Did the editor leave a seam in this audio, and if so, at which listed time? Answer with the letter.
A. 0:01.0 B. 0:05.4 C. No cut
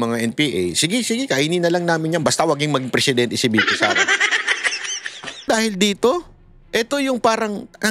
B